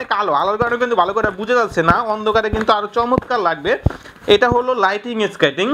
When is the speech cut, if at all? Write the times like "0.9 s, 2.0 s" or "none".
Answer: none